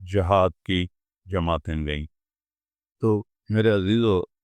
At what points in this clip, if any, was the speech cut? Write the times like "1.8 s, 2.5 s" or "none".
2.6 s